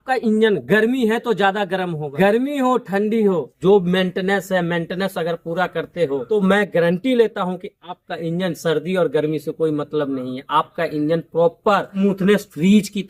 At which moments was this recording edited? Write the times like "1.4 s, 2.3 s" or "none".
none